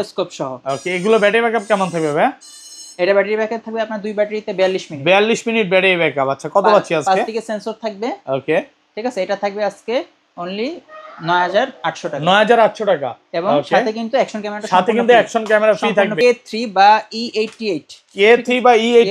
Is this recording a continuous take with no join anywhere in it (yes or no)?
no